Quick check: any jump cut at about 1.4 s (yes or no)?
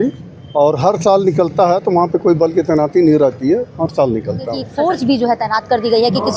no